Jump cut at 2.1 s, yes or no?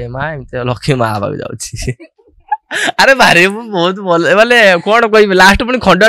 no